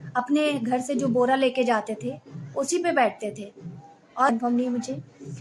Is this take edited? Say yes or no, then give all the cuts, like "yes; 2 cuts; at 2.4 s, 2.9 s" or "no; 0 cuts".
yes; 1 cut; at 4.3 s